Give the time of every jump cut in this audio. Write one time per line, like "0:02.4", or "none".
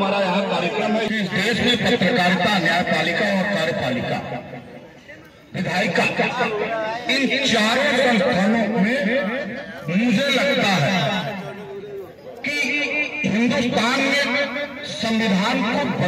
0:01.1